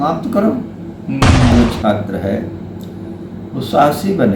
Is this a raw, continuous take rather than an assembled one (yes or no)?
no